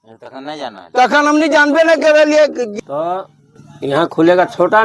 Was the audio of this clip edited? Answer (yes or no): yes